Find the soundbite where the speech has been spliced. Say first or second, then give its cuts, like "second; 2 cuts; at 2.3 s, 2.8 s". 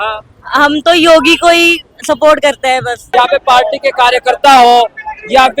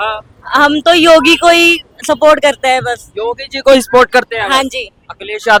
first; 1 cut; at 3.0 s